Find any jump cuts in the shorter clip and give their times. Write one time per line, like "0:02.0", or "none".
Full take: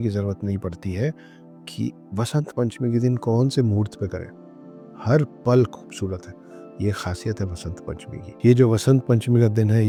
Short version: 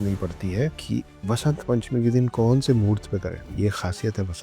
0:00.8
0:03.4